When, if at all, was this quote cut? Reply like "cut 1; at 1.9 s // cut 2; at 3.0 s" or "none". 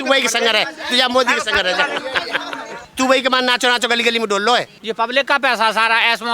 cut 1; at 2.8 s // cut 2; at 4.7 s